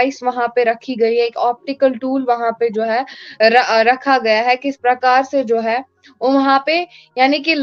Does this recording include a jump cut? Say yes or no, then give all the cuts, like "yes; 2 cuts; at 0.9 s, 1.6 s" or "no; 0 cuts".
no; 0 cuts